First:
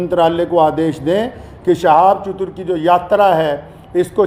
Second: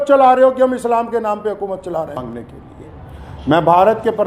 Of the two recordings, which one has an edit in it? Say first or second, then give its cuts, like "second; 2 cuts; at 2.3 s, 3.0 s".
second; 1 cut; at 2.5 s